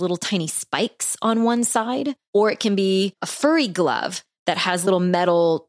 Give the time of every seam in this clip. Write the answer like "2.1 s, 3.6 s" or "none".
2.2 s, 3.2 s, 4.9 s